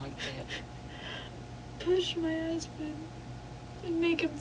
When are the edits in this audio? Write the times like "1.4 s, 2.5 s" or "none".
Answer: 1.3 s